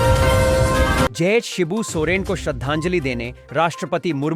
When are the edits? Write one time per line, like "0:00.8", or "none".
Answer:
0:01.1